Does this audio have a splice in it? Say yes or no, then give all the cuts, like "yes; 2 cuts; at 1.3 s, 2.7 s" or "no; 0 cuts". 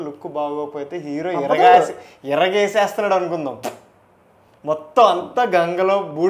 no; 0 cuts